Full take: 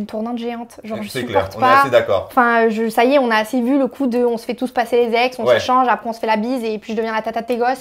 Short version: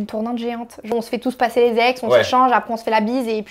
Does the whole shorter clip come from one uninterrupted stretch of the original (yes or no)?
no